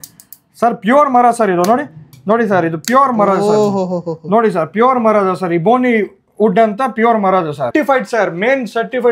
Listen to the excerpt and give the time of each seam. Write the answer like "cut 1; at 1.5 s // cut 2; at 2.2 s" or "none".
cut 1; at 7.7 s